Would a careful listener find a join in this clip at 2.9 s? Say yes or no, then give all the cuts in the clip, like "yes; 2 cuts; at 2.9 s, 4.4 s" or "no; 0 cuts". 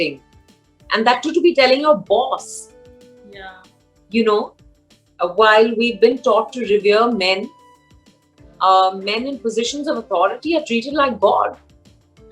no; 0 cuts